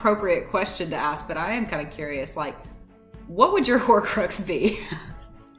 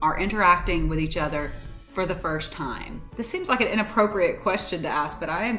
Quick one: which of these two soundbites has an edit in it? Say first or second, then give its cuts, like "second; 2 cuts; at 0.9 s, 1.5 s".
second; 1 cut; at 3.0 s